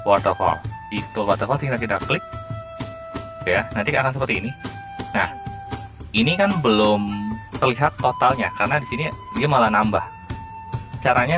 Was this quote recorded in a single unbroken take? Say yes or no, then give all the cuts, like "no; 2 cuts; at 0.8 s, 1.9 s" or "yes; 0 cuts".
no; 1 cut; at 7.4 s